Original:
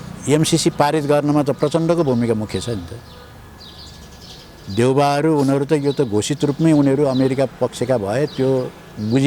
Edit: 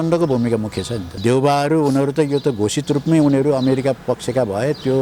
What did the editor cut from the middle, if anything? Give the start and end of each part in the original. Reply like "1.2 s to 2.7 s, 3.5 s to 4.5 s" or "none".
2.8 s to 4.6 s